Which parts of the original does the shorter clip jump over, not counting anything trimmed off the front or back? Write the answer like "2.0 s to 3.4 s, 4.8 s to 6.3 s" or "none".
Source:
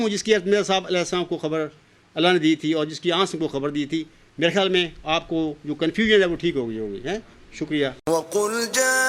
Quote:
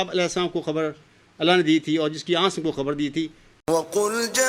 4.3 s to 8.0 s